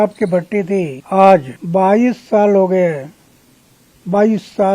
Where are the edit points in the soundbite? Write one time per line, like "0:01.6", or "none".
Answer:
0:01.0
0:01.6